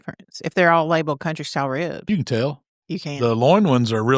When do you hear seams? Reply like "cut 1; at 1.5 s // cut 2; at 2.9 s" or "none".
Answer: cut 1; at 2.1 s